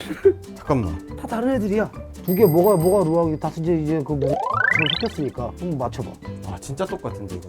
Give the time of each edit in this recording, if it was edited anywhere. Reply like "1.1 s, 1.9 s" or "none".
2.1 s, 6.5 s